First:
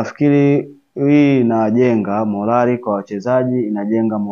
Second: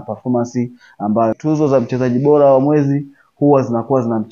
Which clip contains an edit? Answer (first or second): second